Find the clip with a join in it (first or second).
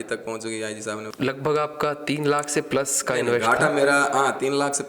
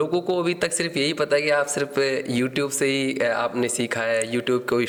first